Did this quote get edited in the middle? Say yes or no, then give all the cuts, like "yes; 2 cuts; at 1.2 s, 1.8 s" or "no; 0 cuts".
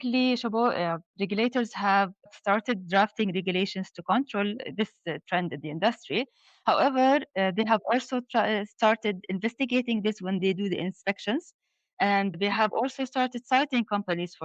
yes; 2 cuts; at 4.6 s, 12.4 s